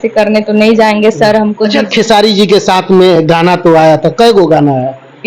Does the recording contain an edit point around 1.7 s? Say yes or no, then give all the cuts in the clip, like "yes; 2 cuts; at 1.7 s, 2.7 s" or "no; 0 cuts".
yes; 1 cut; at 1.7 s